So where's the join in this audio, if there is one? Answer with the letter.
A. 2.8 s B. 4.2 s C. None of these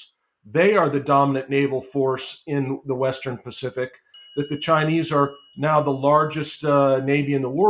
B